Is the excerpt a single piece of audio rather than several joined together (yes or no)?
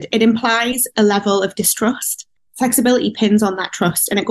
no